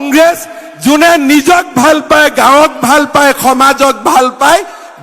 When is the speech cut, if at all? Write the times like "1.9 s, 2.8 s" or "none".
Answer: none